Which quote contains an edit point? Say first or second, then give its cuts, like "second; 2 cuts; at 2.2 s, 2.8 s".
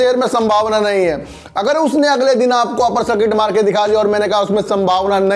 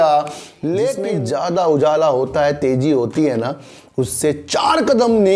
second; 1 cut; at 1.0 s